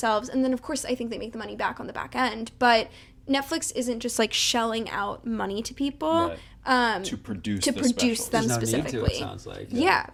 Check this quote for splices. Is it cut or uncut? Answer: uncut